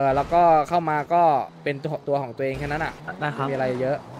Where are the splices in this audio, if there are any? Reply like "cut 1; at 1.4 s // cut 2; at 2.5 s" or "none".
cut 1; at 3.0 s